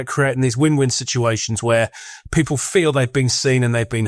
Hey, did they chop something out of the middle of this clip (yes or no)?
no